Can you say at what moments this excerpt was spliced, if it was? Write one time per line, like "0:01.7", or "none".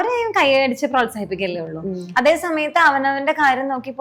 none